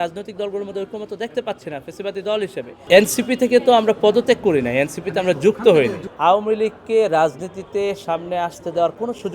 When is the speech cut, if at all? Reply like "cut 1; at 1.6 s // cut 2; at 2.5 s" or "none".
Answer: cut 1; at 2.7 s // cut 2; at 6.0 s